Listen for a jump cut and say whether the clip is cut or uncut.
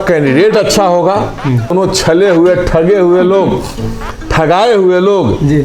cut